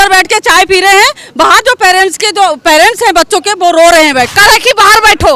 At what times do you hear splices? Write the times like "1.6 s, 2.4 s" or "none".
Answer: 4.3 s